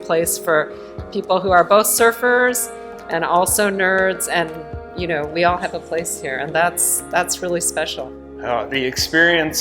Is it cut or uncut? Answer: cut